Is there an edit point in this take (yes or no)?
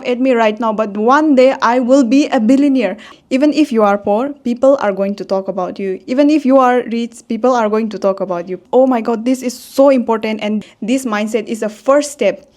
yes